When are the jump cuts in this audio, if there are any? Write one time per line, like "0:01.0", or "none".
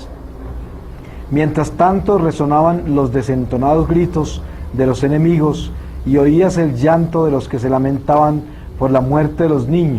none